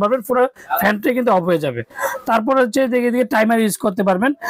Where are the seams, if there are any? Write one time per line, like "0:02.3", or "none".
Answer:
none

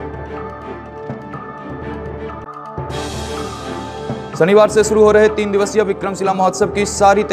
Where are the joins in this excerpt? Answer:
0:02.4

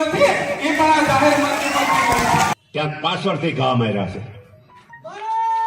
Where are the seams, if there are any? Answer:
0:02.5

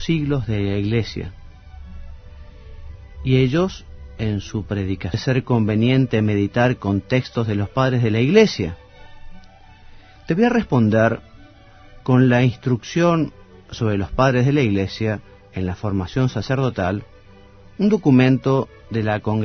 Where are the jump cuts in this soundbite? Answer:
none

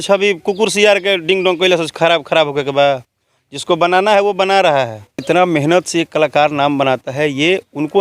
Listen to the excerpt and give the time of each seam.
0:05.2

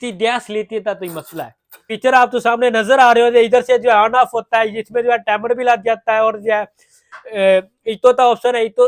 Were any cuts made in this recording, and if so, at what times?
0:01.9

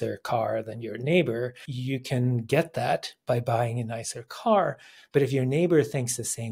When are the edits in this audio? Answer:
0:01.7

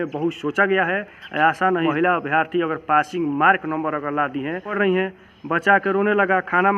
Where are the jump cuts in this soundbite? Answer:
0:01.9
0:04.7

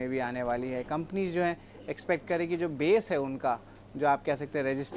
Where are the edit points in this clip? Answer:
none

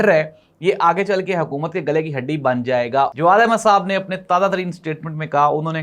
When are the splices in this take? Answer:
0:03.1

